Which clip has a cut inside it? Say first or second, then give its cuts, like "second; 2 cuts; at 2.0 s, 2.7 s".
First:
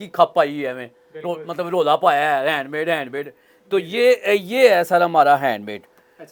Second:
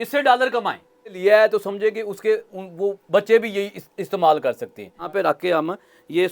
second; 2 cuts; at 1.2 s, 5.1 s